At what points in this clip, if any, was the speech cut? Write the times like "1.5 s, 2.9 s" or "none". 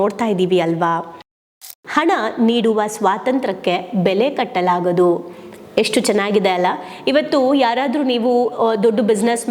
1.7 s